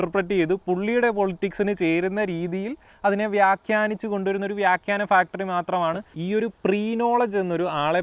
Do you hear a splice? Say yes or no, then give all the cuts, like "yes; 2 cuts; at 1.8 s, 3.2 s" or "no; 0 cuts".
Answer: yes; 1 cut; at 6.1 s